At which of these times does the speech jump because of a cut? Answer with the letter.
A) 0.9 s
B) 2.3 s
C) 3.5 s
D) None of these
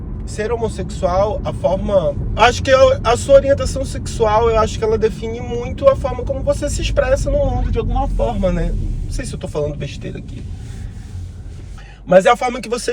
B